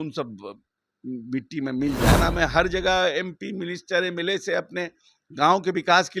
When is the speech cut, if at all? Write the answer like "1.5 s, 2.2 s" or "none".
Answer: 2.2 s